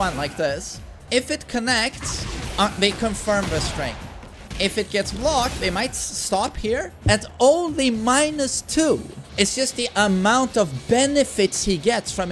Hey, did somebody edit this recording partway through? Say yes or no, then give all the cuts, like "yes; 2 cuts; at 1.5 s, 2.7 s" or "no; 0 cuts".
yes; 3 cuts; at 1.0 s, 4.4 s, 9.2 s